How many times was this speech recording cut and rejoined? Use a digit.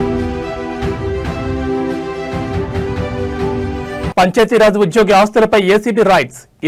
1